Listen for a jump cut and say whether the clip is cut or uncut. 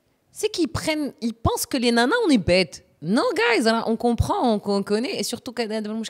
uncut